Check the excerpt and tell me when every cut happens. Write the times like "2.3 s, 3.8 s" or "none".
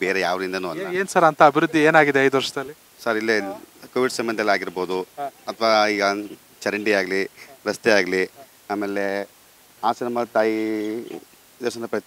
none

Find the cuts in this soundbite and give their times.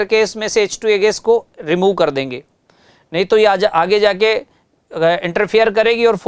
none

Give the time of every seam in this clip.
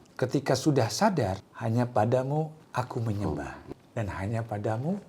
1.5 s, 2.6 s, 3.6 s

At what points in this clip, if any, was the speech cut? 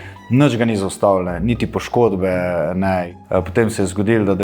3.1 s

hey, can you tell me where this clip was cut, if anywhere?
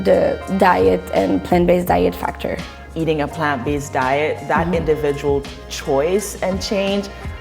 2.6 s

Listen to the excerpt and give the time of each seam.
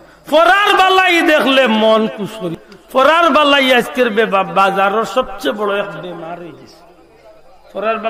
2.4 s

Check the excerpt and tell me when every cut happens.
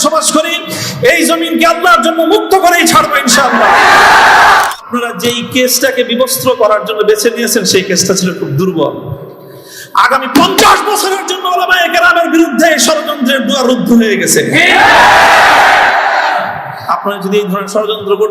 4.7 s

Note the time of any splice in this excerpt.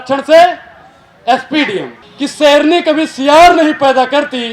2.0 s

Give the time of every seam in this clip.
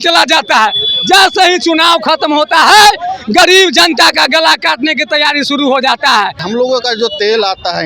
6.4 s

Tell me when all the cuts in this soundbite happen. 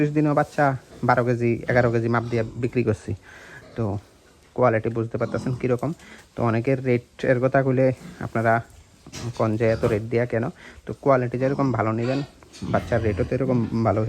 none

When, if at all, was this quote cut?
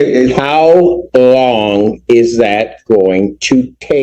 none

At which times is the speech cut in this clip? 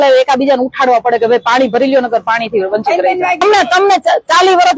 3.4 s

